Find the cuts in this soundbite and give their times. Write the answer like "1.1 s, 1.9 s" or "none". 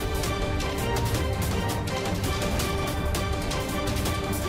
none